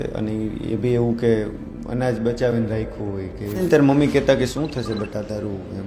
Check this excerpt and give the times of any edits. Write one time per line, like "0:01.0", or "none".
0:03.6

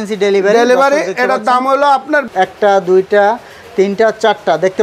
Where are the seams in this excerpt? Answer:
0:02.3

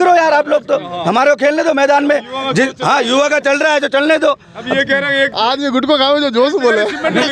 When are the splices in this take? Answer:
none

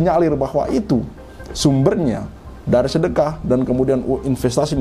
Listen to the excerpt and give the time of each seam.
none

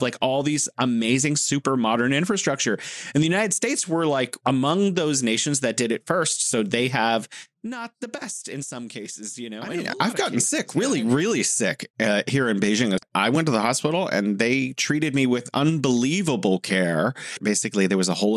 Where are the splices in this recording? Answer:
0:09.8
0:13.0
0:17.4

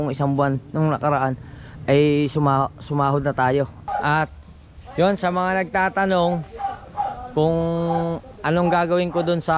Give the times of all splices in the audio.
0:03.8

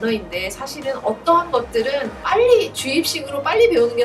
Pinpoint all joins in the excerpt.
0:02.1

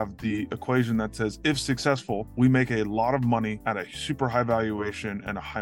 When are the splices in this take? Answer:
0:02.3
0:03.6

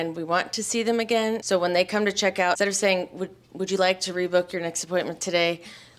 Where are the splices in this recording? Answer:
0:01.4
0:02.6

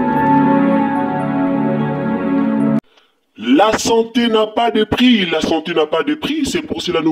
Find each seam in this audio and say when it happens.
0:02.8

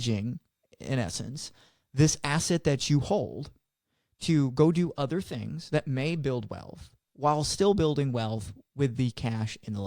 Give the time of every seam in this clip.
none

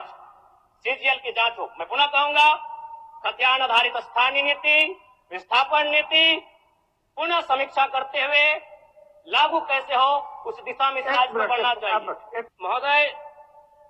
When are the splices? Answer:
0:12.5

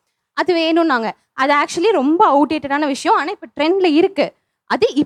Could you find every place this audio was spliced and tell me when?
none

